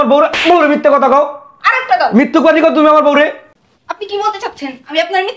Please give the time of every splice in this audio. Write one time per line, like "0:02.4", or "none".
0:03.4